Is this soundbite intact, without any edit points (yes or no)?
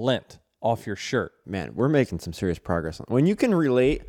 no